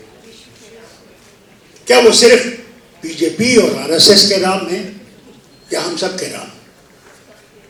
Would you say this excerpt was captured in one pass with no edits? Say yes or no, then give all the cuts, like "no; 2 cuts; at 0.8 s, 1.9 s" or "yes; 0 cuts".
yes; 0 cuts